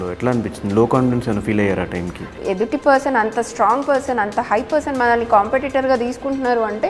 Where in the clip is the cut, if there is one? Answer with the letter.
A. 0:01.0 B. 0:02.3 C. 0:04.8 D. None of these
B